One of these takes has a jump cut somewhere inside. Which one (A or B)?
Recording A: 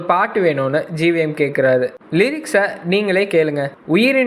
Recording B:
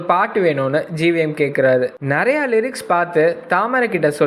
A